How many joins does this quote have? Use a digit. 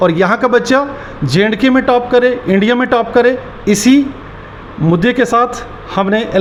0